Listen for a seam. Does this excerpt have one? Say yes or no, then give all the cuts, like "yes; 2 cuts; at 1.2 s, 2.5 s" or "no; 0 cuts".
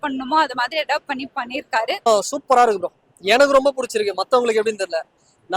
yes; 1 cut; at 2.0 s